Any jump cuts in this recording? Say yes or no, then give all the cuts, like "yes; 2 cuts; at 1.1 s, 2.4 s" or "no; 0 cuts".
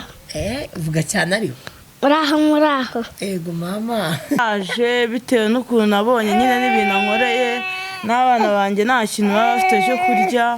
yes; 1 cut; at 4.4 s